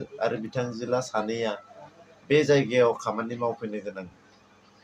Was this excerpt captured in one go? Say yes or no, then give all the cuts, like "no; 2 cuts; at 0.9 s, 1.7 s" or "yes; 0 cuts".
yes; 0 cuts